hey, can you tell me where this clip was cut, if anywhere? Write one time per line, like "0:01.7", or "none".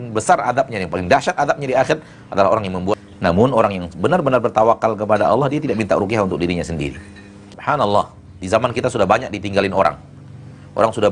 0:03.0
0:07.5